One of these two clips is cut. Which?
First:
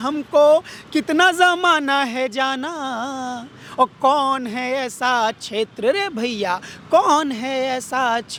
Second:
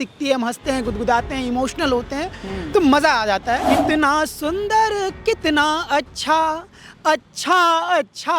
second; 1 cut; at 3.6 s

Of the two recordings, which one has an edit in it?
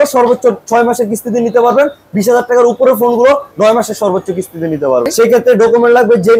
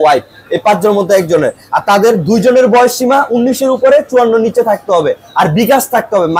first; 1 cut; at 5.1 s

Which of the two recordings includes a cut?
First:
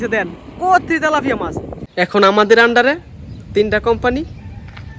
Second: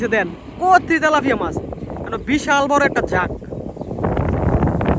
first; 1 cut; at 1.8 s

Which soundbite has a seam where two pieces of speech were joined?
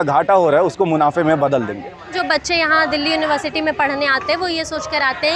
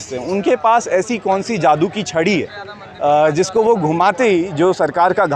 first; 1 cut; at 2.2 s

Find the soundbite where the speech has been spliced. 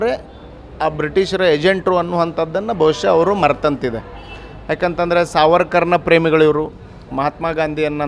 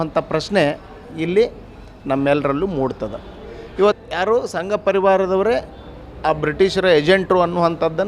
second; 1 cut; at 4.0 s

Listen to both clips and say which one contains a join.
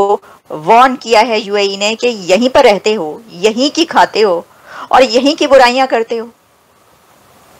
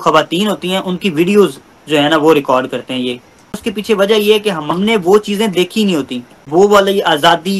second; 3 cuts; at 3.6 s, 4.7 s, 6.4 s

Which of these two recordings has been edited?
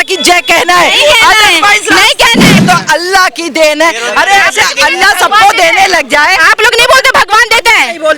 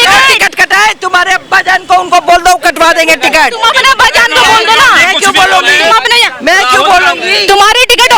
first; 1 cut; at 2.6 s

